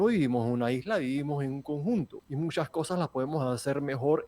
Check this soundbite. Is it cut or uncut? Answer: cut